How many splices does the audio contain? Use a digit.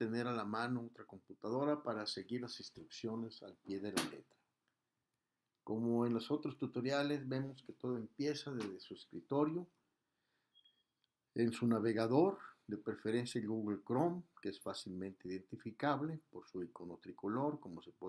1